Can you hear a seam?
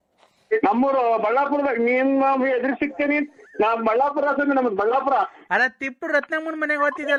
no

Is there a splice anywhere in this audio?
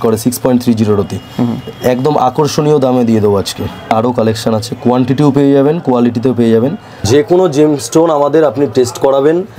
yes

